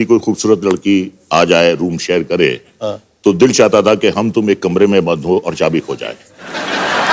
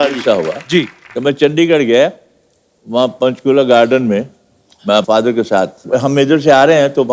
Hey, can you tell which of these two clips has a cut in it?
second; 2 cuts; at 1.0 s, 5.8 s

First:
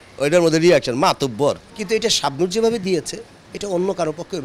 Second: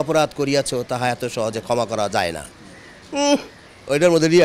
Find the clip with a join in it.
first; 1 cut; at 1.7 s

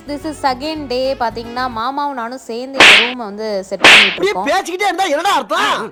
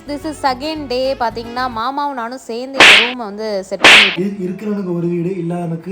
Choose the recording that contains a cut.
second; 1 cut; at 4.1 s

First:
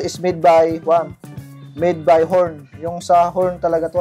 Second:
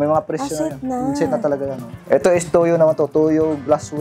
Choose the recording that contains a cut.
second; 1 cut; at 1.9 s

